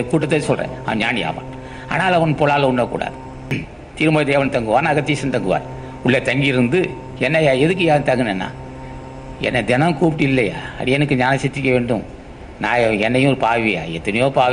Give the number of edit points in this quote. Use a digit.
1